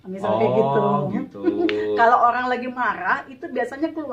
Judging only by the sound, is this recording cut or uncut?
uncut